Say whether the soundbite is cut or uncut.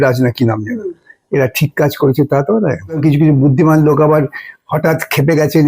cut